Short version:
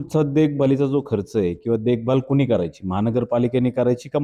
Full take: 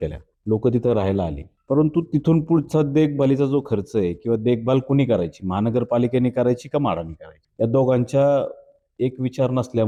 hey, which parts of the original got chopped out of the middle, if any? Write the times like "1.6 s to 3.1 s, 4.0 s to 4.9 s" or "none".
none